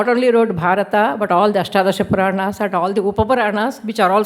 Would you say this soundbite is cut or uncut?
uncut